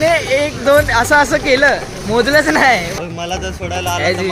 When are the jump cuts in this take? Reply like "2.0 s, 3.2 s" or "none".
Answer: 2.9 s